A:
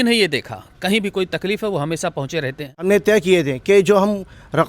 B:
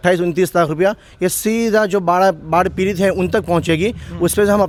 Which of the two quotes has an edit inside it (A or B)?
A